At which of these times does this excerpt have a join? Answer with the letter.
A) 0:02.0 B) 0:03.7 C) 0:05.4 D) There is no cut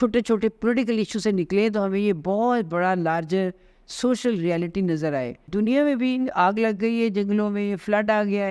C